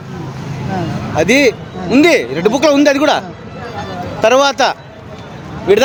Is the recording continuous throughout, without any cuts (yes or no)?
yes